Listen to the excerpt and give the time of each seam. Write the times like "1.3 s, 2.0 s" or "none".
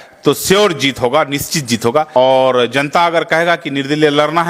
2.2 s